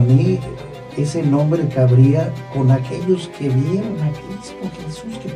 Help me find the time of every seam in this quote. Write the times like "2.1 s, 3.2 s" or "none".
none